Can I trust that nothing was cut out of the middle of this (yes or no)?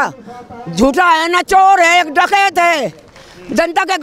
yes